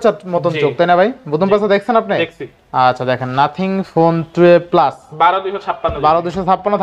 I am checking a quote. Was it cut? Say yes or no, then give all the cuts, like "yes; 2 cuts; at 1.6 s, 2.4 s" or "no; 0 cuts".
no; 0 cuts